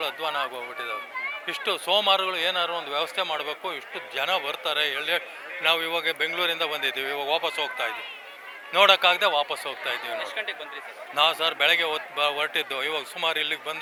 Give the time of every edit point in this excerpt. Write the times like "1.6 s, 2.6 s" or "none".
none